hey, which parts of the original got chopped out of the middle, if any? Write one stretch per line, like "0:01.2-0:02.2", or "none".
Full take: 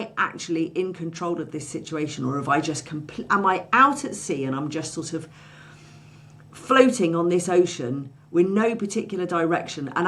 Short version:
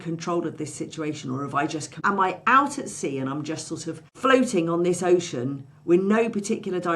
0:02.9-0:03.2
0:05.3-0:06.5